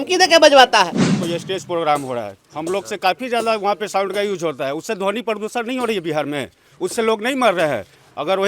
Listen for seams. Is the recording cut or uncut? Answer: cut